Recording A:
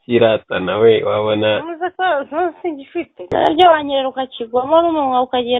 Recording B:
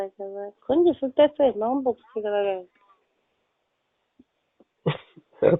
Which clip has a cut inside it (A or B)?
A